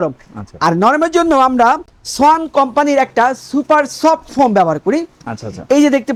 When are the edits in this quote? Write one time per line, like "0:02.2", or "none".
none